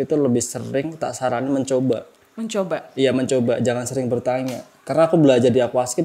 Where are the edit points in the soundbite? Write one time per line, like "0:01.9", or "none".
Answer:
none